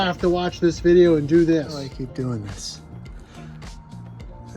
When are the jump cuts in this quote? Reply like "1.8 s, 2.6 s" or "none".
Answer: 1.9 s